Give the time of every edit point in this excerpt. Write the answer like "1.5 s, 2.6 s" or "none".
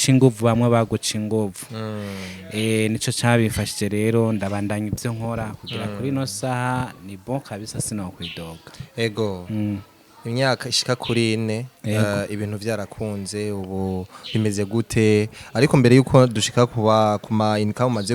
none